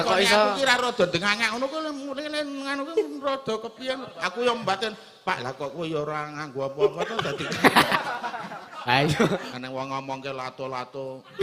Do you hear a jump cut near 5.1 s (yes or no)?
no